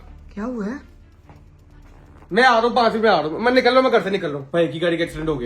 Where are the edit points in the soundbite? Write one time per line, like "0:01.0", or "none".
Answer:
0:04.4